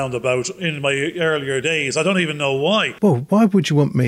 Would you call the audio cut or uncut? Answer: cut